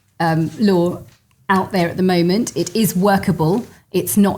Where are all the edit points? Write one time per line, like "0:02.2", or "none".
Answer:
none